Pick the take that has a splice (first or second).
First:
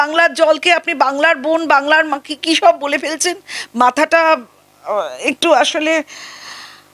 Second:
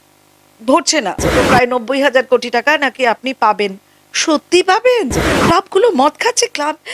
second